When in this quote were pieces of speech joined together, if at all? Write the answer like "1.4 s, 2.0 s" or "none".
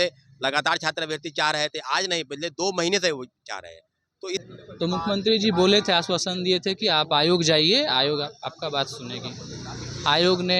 4.4 s